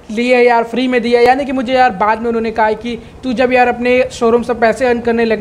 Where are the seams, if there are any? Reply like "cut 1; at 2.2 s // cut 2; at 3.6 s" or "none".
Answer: none